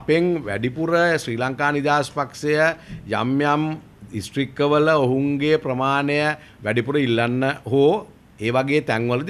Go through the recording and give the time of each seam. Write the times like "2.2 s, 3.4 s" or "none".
none